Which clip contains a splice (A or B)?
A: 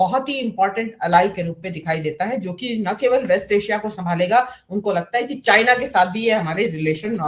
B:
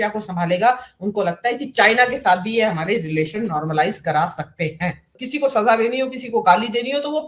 B